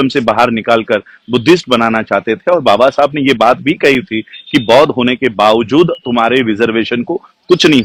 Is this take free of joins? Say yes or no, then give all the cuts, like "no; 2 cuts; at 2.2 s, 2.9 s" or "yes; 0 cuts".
yes; 0 cuts